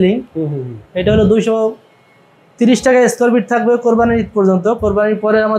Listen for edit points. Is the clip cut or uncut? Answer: uncut